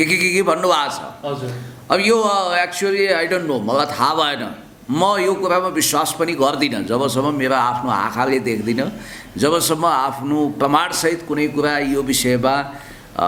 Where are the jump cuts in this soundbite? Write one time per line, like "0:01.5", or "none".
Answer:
none